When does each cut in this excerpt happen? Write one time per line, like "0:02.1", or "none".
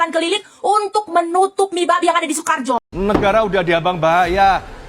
0:02.9